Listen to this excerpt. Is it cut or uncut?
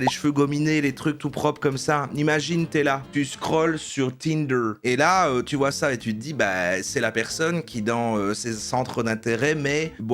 uncut